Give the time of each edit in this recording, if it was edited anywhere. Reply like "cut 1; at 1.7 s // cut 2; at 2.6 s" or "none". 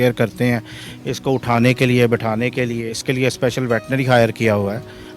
cut 1; at 3.0 s